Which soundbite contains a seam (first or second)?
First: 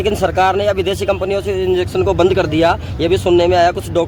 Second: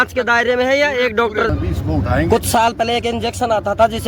second